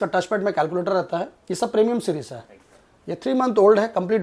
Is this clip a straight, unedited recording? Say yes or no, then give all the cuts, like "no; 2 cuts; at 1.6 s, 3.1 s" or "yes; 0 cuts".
yes; 0 cuts